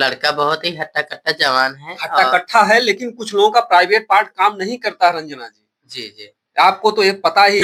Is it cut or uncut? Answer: uncut